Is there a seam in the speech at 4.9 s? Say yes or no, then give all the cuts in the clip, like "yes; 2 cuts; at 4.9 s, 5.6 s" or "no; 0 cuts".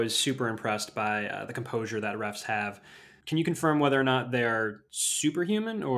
no; 1 cut; at 3.1 s